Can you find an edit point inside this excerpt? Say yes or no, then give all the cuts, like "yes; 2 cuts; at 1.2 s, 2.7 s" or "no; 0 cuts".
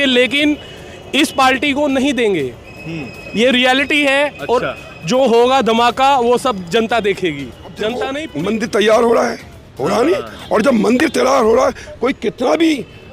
yes; 1 cut; at 8.2 s